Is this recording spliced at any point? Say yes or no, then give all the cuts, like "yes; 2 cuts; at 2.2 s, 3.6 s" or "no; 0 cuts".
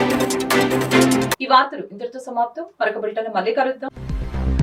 no; 0 cuts